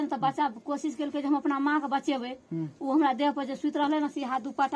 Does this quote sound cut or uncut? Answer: uncut